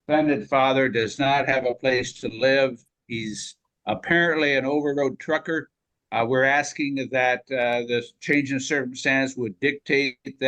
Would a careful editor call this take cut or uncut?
uncut